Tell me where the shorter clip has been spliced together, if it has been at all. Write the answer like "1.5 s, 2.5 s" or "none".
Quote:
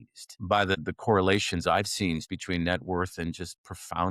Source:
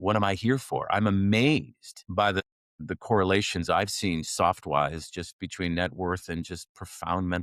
0.9 s, 2.2 s